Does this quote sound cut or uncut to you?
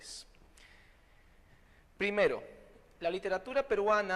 uncut